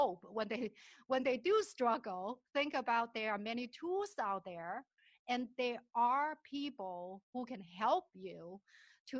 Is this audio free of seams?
yes; 0 cuts

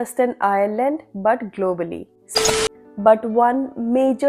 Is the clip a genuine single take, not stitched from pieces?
no; 1 cut; at 2.4 s

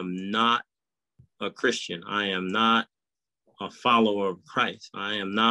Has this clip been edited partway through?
no; 0 cuts

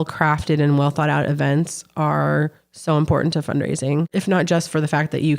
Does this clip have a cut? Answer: yes; 1 cut; at 4.1 s

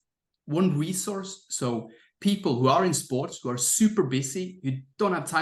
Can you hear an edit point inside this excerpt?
no; 0 cuts

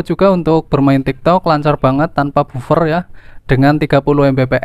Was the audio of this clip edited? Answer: no; 0 cuts

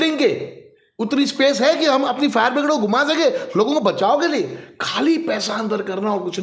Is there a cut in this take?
no; 0 cuts

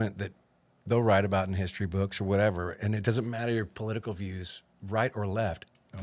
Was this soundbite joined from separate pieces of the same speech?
no; 0 cuts

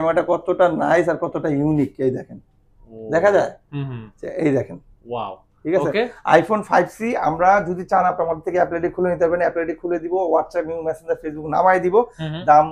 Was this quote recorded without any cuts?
yes; 0 cuts

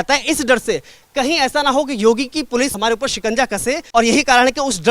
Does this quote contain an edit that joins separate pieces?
yes; 2 cuts; at 2.7 s, 3.8 s

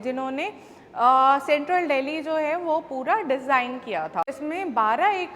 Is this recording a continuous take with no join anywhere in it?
no; 1 cut; at 4.3 s

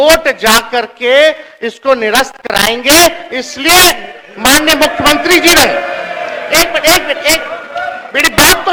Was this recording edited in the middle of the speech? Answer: no; 0 cuts

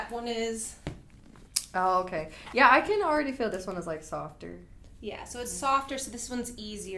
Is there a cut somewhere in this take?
no; 0 cuts

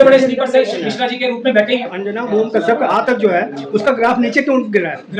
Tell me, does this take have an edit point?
yes; 1 cut; at 2.0 s

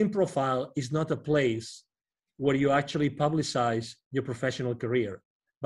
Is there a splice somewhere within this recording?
no; 0 cuts

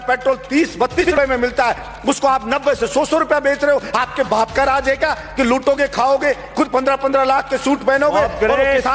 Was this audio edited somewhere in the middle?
yes; 1 cut; at 1.0 s

